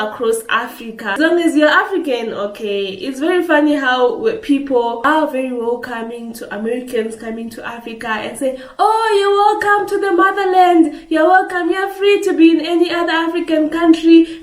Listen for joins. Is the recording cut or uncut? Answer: cut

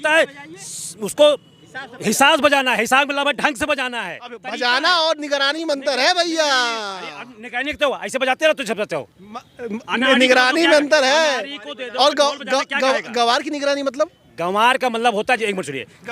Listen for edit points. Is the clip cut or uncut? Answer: uncut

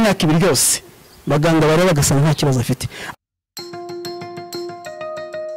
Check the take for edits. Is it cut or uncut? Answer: uncut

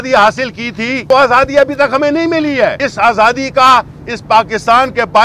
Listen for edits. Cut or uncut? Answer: cut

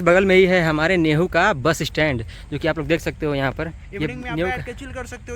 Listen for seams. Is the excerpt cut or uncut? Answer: uncut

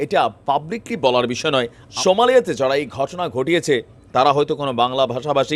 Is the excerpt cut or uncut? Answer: cut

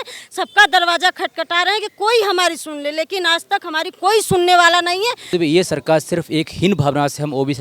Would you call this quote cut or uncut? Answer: cut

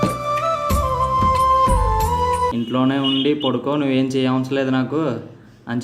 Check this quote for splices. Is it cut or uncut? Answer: cut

